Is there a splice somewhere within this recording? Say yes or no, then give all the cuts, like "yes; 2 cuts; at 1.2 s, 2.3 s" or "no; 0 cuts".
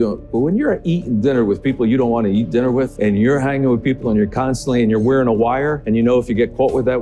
yes; 2 cuts; at 2.9 s, 5.8 s